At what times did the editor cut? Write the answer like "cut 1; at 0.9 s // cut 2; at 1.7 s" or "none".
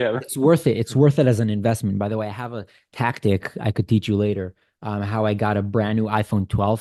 none